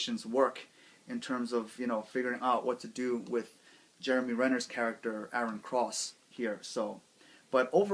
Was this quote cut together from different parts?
no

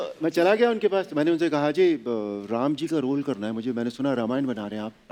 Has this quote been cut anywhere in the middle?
no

